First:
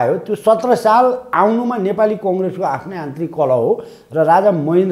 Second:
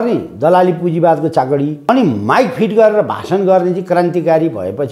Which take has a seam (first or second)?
second